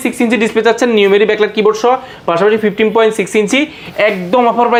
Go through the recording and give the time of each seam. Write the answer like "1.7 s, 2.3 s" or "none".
none